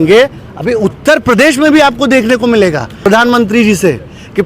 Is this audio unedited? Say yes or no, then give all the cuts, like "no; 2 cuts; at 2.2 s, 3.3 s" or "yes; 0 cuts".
no; 1 cut; at 2.9 s